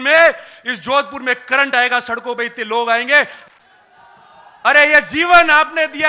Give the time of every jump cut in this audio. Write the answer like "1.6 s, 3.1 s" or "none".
3.4 s